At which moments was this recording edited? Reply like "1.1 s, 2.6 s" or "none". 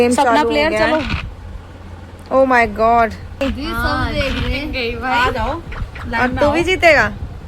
3.4 s